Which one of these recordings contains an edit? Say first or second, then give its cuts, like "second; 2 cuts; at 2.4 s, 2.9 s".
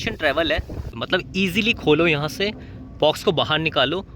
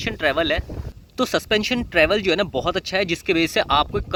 first; 1 cut; at 1.0 s